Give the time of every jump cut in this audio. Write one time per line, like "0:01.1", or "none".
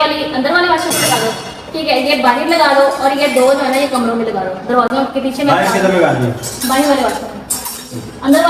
none